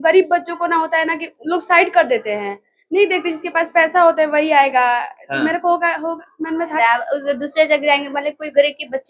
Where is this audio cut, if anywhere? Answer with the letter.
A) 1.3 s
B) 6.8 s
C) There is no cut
B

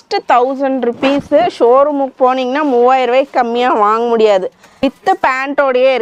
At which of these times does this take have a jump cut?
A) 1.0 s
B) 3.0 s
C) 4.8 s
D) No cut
D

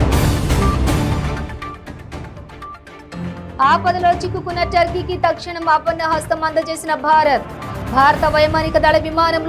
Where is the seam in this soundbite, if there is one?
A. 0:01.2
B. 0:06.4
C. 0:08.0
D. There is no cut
A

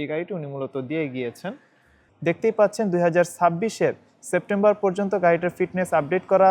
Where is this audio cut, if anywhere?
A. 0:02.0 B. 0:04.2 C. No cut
A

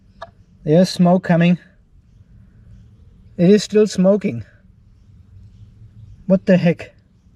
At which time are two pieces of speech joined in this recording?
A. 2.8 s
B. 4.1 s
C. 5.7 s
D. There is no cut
D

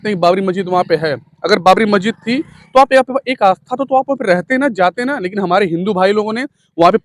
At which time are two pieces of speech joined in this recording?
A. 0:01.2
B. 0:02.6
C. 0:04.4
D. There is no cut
D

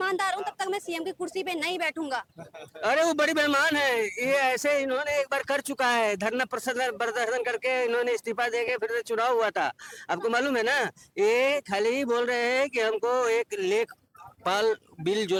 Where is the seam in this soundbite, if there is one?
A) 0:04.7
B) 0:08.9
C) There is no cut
C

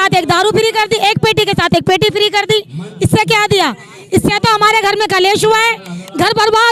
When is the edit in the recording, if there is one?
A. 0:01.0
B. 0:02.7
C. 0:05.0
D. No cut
D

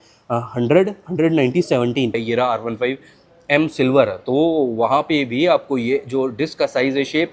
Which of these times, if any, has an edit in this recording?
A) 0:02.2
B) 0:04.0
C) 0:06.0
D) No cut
A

